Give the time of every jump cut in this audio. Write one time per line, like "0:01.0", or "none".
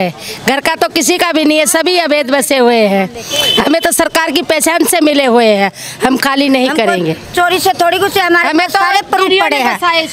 none